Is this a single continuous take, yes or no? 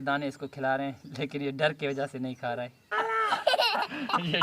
no